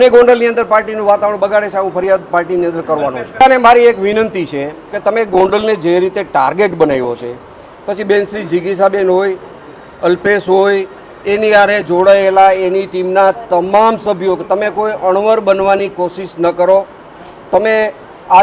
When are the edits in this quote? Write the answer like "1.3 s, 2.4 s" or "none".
3.4 s